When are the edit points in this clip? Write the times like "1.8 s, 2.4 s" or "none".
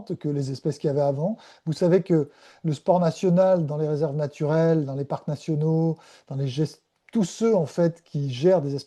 none